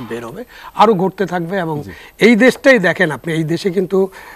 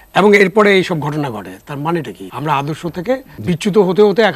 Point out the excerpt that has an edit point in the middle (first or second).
second